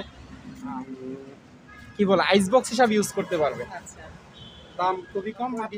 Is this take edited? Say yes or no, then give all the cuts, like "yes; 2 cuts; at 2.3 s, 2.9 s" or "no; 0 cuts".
no; 0 cuts